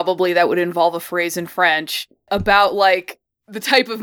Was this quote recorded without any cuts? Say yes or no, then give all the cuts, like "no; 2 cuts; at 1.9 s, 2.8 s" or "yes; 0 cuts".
no; 1 cut; at 2.3 s